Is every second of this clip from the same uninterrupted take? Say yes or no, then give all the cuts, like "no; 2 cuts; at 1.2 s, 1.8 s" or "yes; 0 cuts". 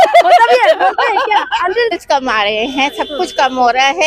no; 1 cut; at 1.9 s